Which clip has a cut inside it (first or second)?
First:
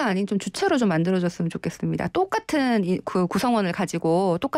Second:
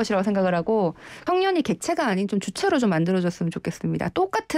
second